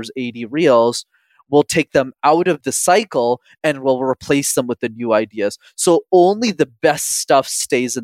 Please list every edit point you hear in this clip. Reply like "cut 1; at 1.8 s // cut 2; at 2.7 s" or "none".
cut 1; at 2.6 s